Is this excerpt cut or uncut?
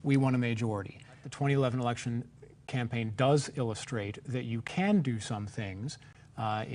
cut